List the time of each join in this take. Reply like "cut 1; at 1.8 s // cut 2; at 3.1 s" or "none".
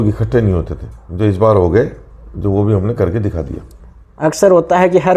none